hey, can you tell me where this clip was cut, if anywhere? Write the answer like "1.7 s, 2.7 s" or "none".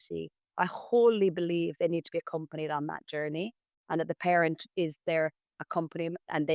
none